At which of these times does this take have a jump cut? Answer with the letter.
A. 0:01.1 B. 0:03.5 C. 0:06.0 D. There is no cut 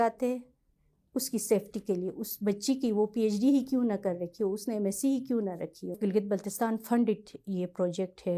C